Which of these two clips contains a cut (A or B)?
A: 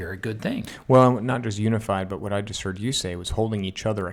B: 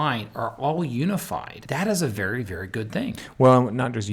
B